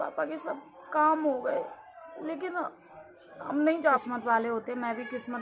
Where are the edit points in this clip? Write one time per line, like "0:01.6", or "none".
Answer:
0:04.0